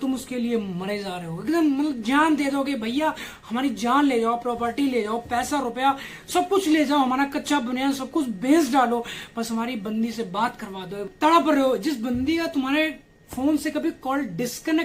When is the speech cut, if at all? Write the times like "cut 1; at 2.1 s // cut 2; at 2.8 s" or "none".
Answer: none